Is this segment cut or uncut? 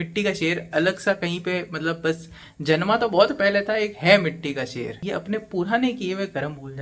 cut